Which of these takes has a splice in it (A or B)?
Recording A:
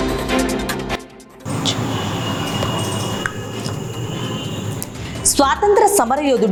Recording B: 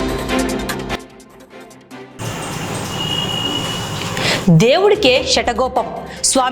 B